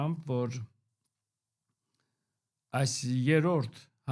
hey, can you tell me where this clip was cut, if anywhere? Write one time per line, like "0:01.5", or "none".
none

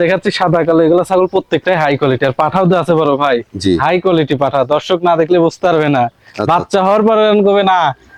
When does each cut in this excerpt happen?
none

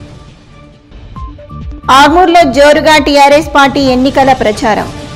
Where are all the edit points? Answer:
none

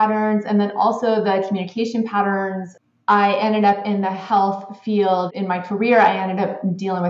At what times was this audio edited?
0:02.7
0:05.3

